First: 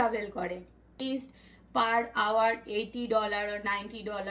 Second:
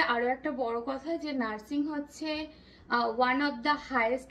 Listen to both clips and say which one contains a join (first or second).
first